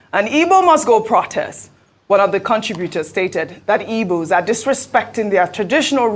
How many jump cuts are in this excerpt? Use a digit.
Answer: 1